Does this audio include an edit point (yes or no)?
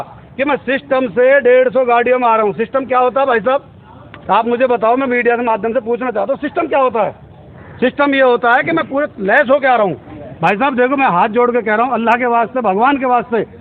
yes